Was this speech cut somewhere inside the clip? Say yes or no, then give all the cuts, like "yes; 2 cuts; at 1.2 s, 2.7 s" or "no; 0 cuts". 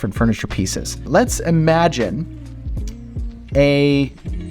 yes; 1 cut; at 1.1 s